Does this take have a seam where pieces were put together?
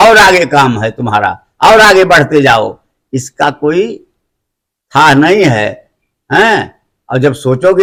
no; 0 cuts

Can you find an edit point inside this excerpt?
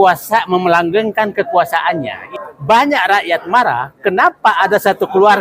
yes; 1 cut; at 2.3 s

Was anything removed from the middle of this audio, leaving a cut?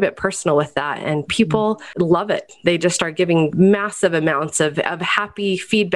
yes; 2 cuts; at 1.9 s, 3.5 s

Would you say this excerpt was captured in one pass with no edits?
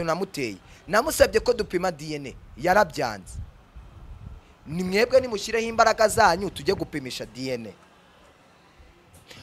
yes; 0 cuts

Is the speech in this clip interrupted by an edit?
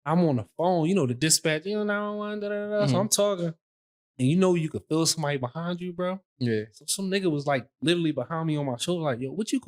no; 0 cuts

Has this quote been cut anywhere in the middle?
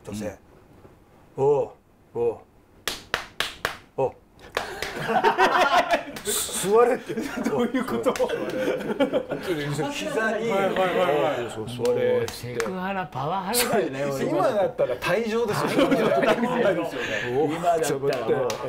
no; 0 cuts

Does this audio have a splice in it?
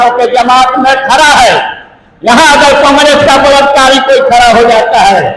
no; 0 cuts

